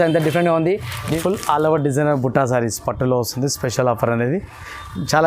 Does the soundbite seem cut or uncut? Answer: cut